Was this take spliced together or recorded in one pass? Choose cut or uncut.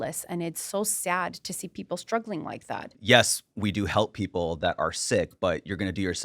cut